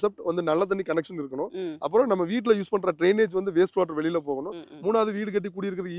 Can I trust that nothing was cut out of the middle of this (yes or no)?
yes